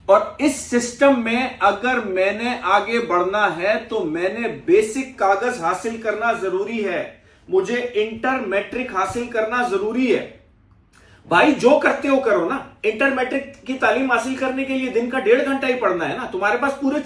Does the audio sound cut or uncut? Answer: uncut